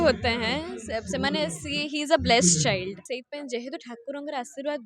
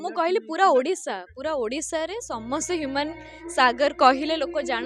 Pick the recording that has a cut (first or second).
first